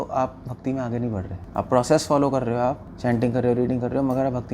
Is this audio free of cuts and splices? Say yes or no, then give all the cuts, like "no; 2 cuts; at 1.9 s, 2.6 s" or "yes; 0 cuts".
no; 2 cuts; at 1.4 s, 2.9 s